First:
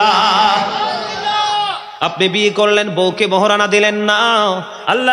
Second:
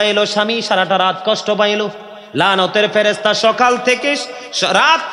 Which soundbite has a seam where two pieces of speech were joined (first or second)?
first